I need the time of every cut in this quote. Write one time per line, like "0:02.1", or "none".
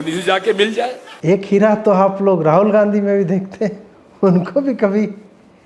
0:01.1